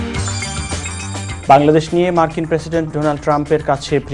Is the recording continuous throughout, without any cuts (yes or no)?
yes